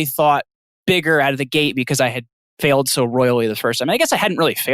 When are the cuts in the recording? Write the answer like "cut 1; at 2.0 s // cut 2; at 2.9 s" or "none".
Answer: cut 1; at 2.5 s